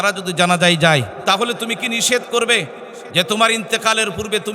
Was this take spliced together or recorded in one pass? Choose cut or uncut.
cut